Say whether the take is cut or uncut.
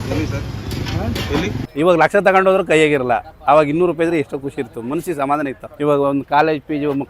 cut